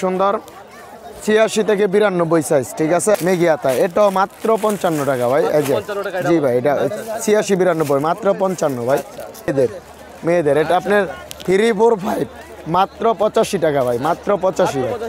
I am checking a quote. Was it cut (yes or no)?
yes